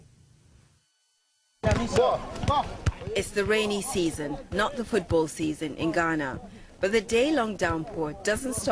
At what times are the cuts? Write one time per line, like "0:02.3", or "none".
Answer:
0:01.3